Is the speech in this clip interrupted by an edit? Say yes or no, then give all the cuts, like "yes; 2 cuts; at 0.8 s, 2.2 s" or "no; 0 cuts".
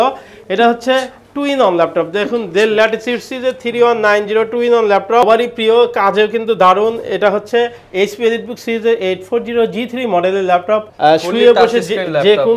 yes; 2 cuts; at 5.2 s, 10.9 s